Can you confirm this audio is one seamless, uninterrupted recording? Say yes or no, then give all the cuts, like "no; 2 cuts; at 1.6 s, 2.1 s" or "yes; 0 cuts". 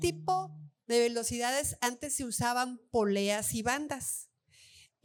yes; 0 cuts